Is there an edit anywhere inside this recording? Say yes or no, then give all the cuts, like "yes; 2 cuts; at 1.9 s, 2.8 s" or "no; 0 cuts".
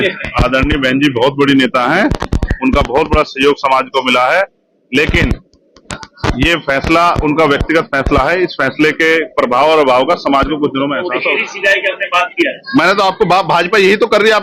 yes; 1 cut; at 11.1 s